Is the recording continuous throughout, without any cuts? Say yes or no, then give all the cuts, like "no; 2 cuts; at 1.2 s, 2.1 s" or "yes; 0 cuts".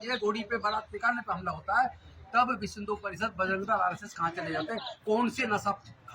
yes; 0 cuts